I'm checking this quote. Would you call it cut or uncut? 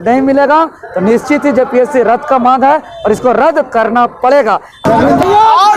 cut